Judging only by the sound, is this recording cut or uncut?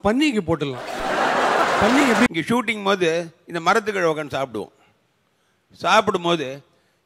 cut